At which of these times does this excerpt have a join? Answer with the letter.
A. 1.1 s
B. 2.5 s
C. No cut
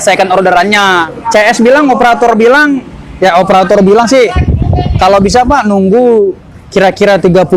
A